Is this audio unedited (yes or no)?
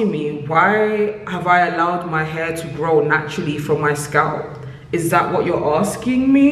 yes